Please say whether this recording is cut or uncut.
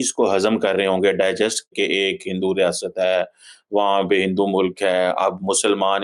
uncut